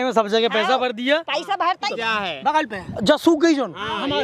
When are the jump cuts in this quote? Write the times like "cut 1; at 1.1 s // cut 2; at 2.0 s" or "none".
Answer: cut 1; at 1.9 s